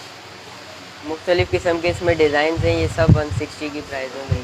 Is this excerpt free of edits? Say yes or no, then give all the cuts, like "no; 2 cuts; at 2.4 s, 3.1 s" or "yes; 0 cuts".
no; 1 cut; at 1.0 s